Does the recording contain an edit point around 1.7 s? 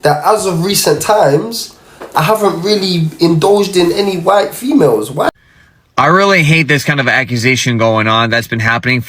no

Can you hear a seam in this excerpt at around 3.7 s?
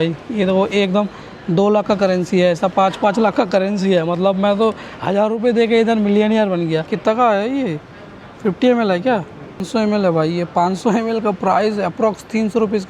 no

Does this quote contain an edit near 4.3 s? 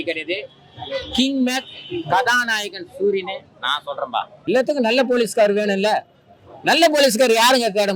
yes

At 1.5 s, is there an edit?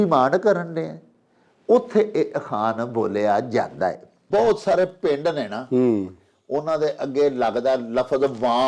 no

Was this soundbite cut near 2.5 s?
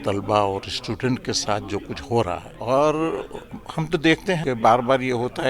yes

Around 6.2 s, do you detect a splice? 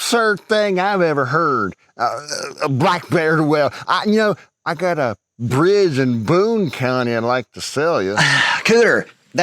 no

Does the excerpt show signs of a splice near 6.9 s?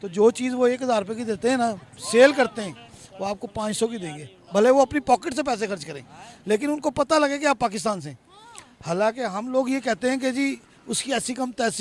no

